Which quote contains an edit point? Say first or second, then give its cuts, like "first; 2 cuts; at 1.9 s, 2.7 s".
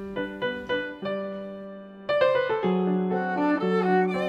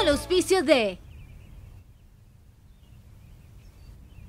second; 1 cut; at 1.1 s